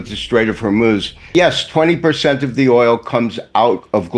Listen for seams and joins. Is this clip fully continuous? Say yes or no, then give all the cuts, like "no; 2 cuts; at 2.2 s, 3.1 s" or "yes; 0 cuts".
no; 1 cut; at 1.2 s